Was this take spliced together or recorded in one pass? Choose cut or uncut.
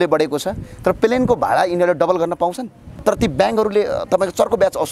cut